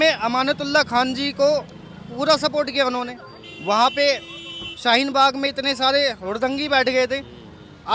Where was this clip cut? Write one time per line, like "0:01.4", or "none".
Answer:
none